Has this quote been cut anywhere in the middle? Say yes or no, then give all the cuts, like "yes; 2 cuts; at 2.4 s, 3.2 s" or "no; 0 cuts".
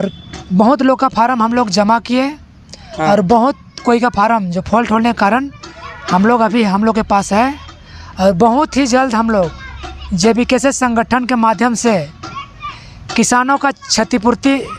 no; 0 cuts